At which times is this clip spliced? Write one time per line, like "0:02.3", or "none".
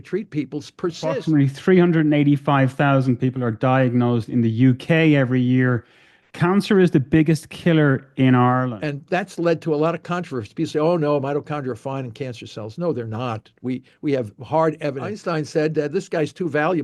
0:01.2
0:08.7
0:15.1

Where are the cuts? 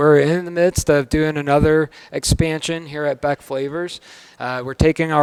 none

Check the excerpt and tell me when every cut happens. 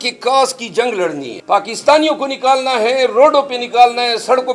0:01.3

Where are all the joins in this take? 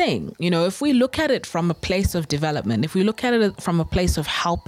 none

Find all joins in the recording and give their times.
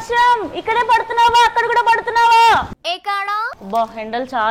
none

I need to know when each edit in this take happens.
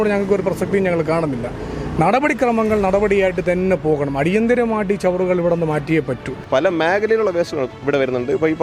0:06.3

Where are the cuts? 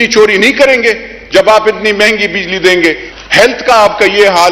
0:03.0

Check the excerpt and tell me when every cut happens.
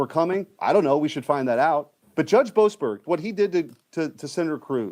0:02.0
0:03.0

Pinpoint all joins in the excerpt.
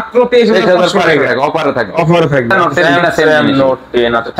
0:02.7

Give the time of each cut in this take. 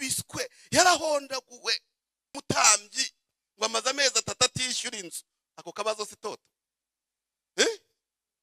0:02.4

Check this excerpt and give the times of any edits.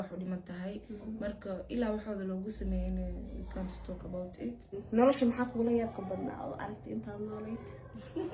0:04.7

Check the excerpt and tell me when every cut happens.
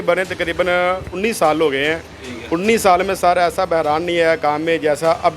none

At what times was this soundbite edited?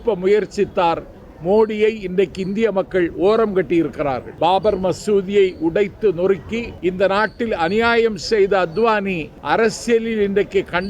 0:04.3
0:06.7
0:09.3

